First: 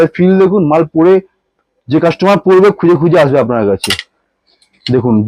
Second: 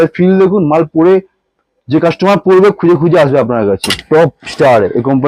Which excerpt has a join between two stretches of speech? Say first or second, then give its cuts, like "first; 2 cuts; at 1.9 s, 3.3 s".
second; 1 cut; at 4.0 s